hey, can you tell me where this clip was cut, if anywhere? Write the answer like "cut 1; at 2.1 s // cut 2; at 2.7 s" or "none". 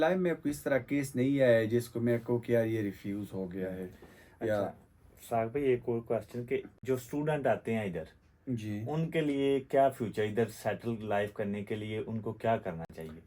none